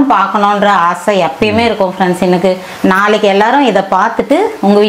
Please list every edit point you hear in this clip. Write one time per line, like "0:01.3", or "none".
0:02.7